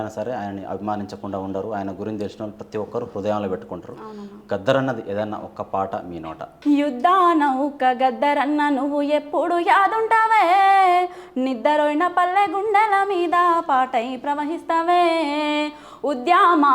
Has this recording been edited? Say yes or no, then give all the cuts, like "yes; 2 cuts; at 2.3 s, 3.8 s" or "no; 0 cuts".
yes; 1 cut; at 6.5 s